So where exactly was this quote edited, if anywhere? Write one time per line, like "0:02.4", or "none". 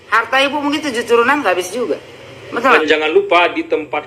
0:02.7

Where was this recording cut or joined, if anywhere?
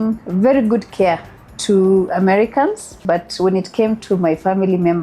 0:02.9

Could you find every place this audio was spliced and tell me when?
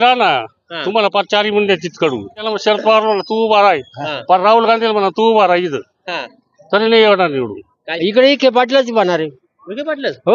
0:02.4
0:07.8

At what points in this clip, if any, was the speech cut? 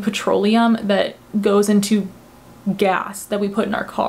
none

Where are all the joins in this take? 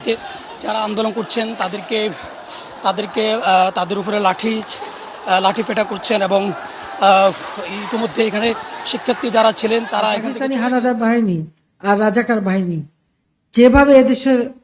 0:10.4

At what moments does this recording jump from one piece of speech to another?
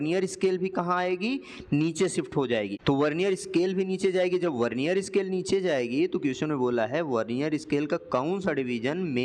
none

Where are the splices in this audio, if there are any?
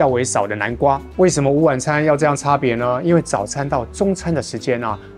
0:01.1

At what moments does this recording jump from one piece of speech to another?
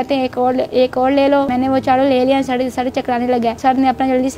0:01.5
0:03.6

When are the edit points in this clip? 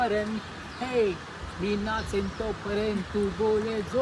none

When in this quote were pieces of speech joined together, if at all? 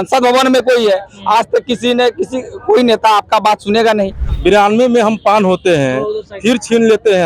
0:04.2

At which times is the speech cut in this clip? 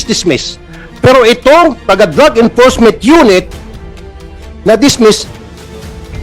0:02.0

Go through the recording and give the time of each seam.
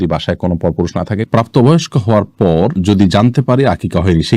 0:01.2

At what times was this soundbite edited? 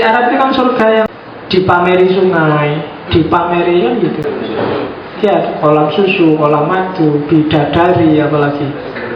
0:01.1
0:04.2

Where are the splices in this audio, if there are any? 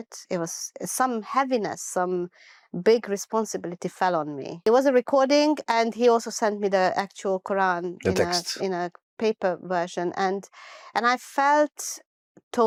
none

